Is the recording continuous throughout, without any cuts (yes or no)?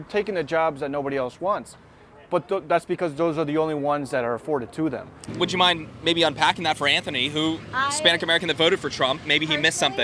no